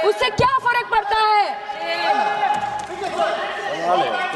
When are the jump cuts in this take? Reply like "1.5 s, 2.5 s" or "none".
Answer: none